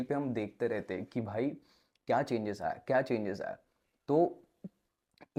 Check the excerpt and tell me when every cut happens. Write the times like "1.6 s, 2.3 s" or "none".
none